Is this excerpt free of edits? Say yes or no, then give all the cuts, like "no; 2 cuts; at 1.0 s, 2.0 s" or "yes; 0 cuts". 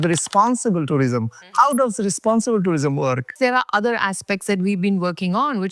no; 1 cut; at 3.3 s